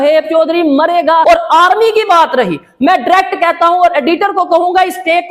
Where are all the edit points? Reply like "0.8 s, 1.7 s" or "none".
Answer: 1.2 s